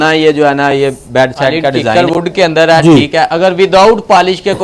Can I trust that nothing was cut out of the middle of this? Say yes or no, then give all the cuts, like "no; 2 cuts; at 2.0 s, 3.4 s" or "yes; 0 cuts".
no; 1 cut; at 1.9 s